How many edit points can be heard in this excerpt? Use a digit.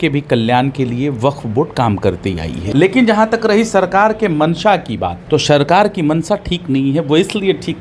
2